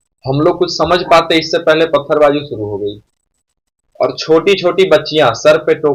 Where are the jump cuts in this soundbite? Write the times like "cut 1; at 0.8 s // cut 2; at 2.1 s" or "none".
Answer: none